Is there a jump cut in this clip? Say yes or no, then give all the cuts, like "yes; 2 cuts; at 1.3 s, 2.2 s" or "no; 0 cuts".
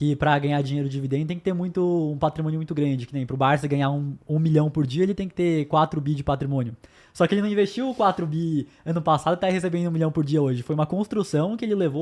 no; 0 cuts